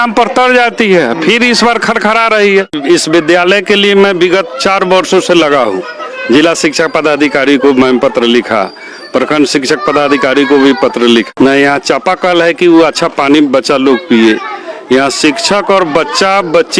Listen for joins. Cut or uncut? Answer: cut